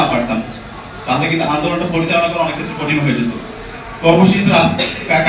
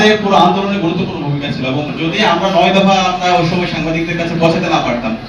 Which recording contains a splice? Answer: second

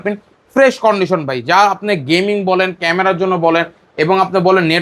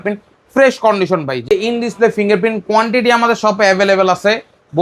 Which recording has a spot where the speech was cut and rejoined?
second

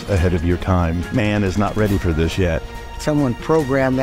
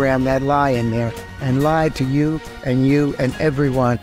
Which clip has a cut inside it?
first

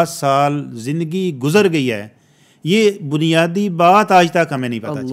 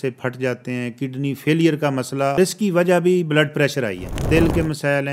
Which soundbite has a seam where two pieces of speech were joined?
second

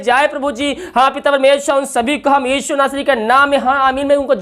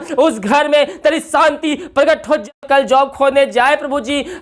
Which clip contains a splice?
second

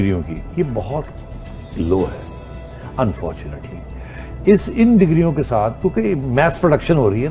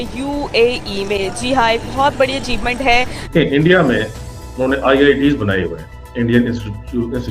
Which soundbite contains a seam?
second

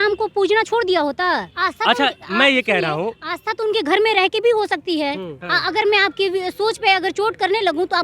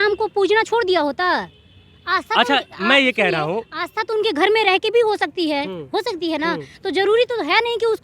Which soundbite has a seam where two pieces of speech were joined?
first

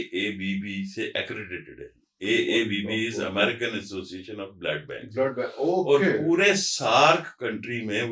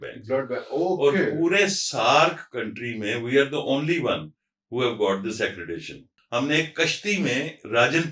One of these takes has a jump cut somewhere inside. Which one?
second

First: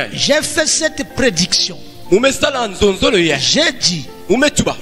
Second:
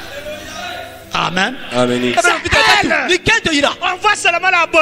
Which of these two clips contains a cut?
second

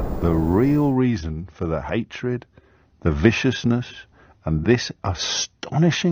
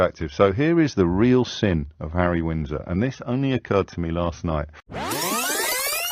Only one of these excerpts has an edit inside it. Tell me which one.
second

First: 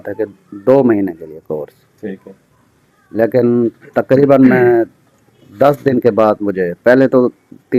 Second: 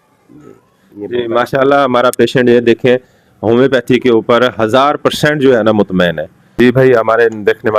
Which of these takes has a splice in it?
second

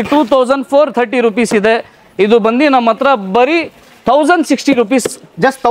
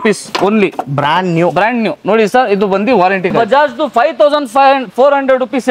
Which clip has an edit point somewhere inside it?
second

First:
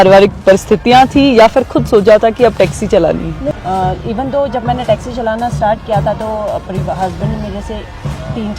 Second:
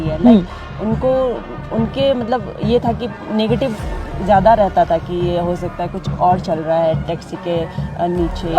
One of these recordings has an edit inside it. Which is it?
first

